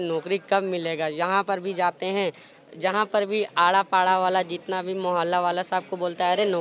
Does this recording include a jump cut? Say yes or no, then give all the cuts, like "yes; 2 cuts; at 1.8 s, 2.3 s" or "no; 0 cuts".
no; 0 cuts